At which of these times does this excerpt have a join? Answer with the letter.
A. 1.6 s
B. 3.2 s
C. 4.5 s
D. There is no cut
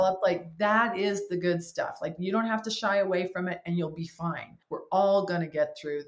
C